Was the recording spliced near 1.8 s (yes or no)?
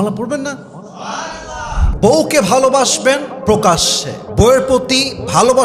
yes